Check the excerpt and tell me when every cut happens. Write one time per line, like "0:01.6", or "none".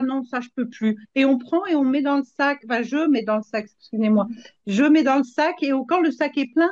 none